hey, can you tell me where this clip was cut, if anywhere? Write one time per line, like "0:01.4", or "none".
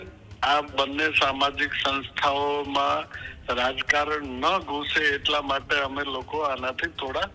none